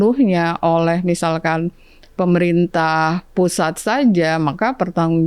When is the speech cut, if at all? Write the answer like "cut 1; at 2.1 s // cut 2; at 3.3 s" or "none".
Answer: none